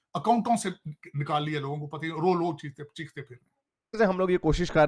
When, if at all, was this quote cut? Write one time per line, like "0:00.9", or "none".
0:04.0